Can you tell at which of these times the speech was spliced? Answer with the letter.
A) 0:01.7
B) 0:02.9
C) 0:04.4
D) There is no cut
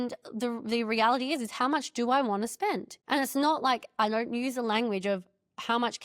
B